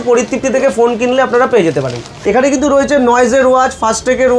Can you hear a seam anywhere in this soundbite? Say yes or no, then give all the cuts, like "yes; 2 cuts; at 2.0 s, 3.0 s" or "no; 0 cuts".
yes; 1 cut; at 2.1 s